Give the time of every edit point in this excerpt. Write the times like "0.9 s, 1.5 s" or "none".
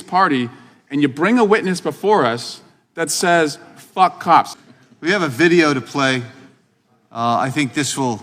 4.5 s